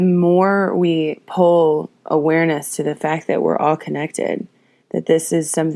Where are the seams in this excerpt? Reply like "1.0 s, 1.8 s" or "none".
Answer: none